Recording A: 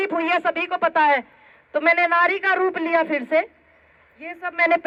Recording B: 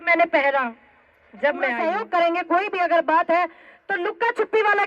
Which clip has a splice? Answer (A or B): B